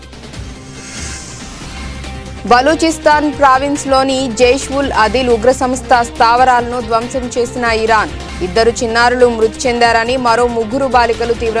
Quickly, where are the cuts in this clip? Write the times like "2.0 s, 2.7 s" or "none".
1.6 s